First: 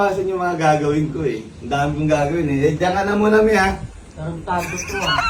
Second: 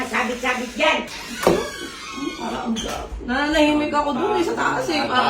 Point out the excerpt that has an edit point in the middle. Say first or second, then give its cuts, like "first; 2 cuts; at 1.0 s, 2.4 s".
second; 1 cut; at 1.1 s